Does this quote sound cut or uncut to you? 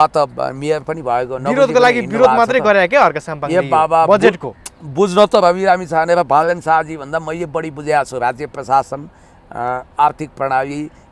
uncut